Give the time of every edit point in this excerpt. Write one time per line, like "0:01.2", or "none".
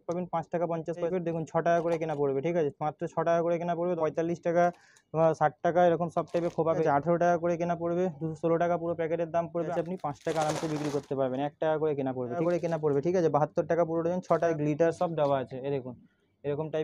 0:01.1
0:04.0
0:06.8
0:09.7
0:12.4
0:14.5